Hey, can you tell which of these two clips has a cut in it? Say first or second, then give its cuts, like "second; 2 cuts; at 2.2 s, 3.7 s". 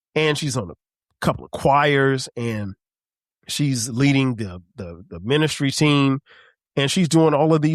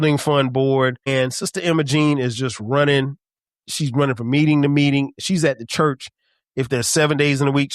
second; 1 cut; at 1.1 s